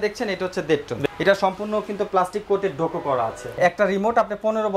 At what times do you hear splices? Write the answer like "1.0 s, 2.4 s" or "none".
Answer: 1.0 s, 3.5 s